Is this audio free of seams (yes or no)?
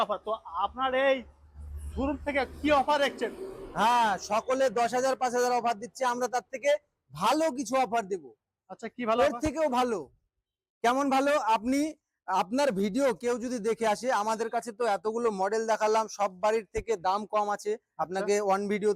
yes